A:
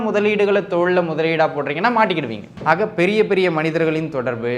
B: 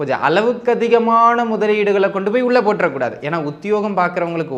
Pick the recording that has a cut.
A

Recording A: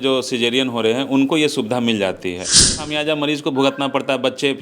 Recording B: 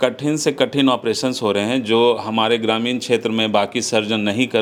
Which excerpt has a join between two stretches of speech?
A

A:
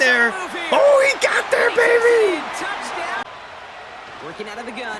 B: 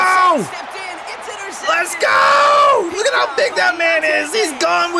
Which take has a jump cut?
A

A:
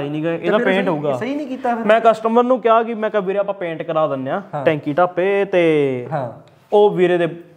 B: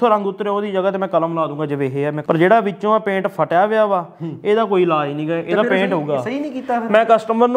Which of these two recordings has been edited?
B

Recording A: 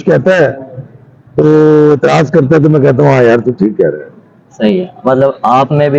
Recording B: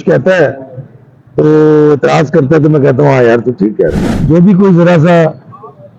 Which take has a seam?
B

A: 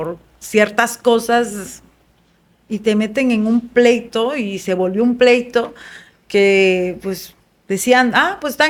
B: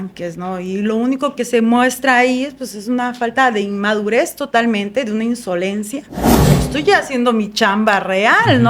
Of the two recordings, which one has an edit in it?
B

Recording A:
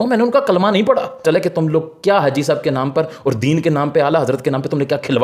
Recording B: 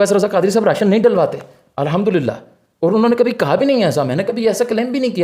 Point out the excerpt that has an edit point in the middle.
A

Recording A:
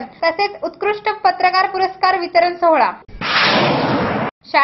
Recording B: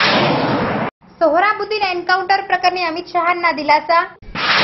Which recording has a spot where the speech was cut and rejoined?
B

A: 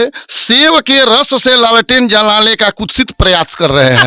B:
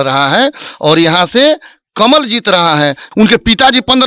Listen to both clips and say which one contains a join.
B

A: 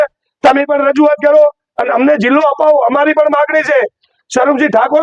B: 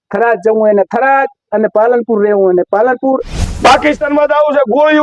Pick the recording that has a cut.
B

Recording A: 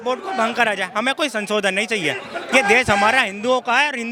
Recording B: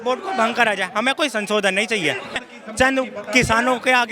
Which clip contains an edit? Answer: B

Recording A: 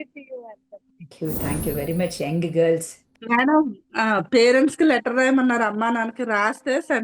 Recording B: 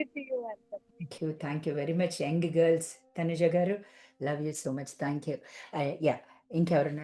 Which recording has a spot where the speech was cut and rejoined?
A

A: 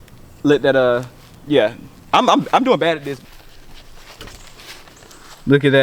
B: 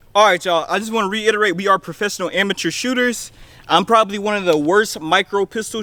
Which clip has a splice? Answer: A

